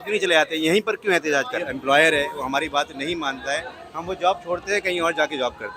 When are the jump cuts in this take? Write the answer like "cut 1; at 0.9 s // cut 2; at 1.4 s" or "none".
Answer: cut 1; at 1.6 s